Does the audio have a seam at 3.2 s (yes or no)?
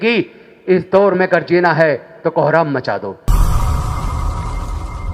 yes